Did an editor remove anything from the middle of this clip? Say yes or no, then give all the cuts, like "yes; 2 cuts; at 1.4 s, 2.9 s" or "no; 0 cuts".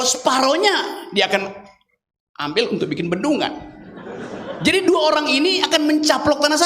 no; 0 cuts